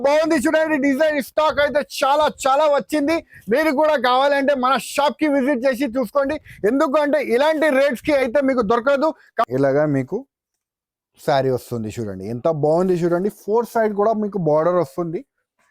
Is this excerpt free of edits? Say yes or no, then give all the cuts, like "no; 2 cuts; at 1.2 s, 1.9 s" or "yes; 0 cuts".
no; 1 cut; at 9.5 s